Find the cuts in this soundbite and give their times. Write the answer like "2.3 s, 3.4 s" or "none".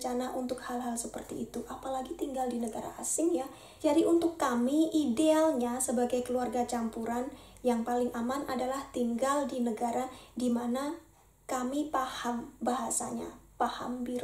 none